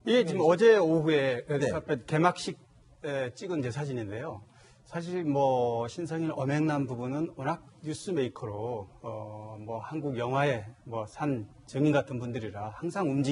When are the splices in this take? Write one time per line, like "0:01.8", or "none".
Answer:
0:06.2